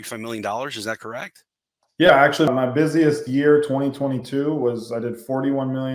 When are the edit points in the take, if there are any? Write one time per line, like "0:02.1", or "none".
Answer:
0:02.5